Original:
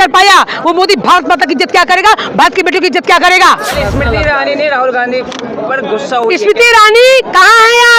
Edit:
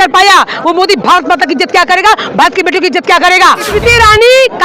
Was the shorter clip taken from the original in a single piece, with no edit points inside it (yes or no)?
no